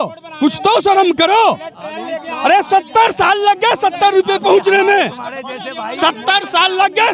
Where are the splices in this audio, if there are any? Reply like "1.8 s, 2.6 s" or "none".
none

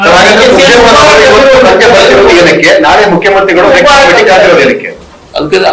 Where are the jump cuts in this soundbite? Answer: 3.3 s

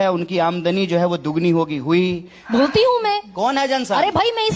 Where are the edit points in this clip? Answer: 2.3 s

